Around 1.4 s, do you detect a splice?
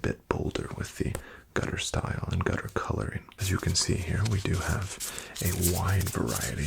no; 1 cut; at 3.3 s

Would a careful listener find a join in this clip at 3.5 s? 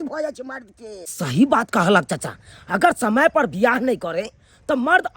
no; 1 cut; at 1.1 s

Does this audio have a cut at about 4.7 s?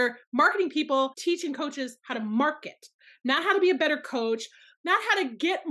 yes; 1 cut; at 4.7 s

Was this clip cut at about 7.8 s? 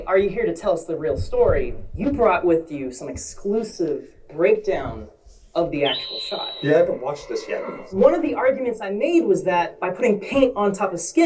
yes; 1 cut; at 7.8 s

